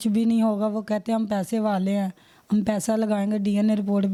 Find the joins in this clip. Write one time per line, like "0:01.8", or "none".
none

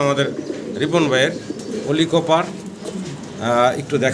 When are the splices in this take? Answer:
0:01.7

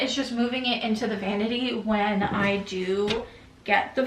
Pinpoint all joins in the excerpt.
none

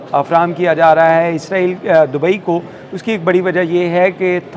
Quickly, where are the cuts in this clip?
none

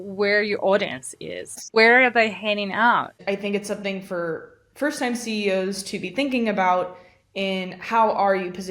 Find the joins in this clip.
0:01.6
0:03.1

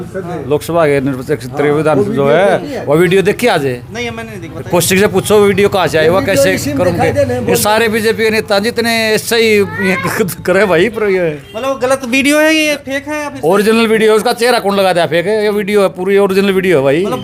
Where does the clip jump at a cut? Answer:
none

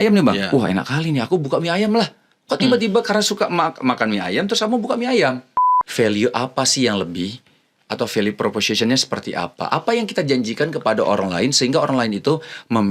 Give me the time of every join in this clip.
0:05.8

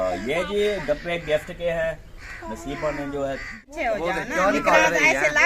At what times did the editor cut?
0:03.6

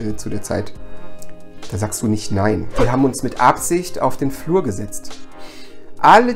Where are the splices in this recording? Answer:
0:02.7

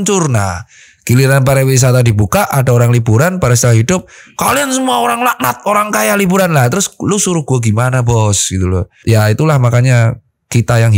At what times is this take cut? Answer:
0:09.0

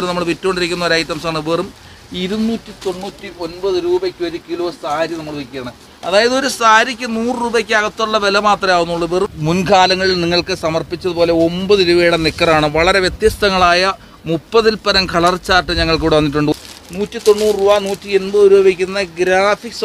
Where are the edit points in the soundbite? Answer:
0:09.4
0:16.5

